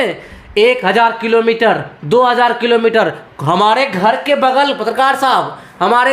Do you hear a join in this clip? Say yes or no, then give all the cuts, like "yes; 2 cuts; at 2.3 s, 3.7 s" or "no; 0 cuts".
no; 0 cuts